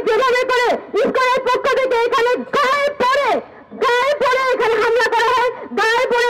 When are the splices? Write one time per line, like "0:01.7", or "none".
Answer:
none